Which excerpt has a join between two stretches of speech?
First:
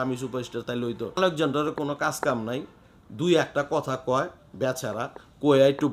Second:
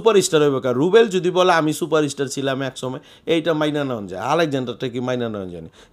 first; 1 cut; at 1.2 s

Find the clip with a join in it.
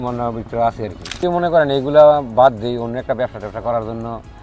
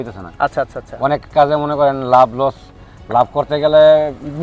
first; 1 cut; at 1.2 s

